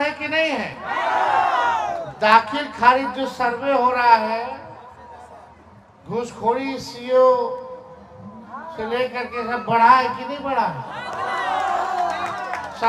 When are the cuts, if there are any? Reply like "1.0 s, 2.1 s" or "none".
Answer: none